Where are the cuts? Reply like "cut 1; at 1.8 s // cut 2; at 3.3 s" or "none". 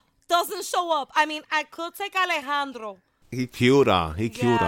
cut 1; at 3.4 s